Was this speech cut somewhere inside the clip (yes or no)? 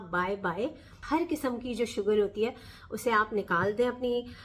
no